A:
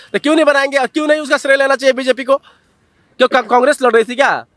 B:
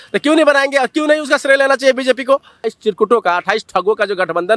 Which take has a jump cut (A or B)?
B